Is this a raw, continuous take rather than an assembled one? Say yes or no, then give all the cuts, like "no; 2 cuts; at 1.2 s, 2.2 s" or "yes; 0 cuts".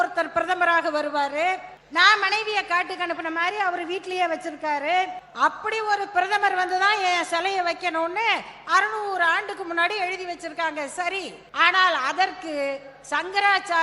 no; 3 cuts; at 1.8 s, 5.2 s, 11.4 s